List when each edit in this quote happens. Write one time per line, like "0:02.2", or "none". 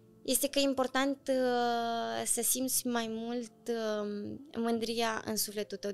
none